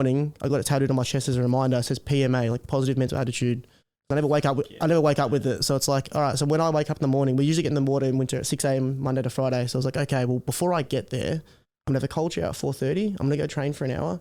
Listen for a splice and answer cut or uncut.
uncut